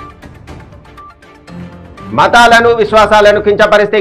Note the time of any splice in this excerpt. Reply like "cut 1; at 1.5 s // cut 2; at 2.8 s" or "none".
cut 1; at 1.8 s